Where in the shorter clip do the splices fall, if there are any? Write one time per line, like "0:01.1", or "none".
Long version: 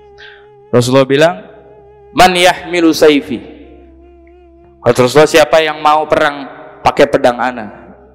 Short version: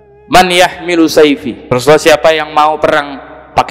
0:01.7